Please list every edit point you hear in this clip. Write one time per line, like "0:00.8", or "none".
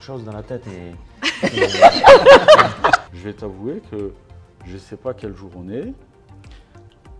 0:03.0